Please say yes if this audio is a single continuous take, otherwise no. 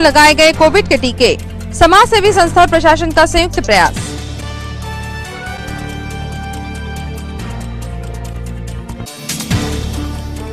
yes